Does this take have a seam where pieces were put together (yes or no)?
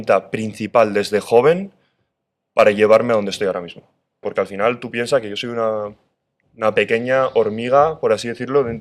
yes